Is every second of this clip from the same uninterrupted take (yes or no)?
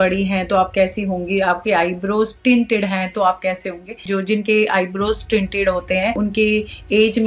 no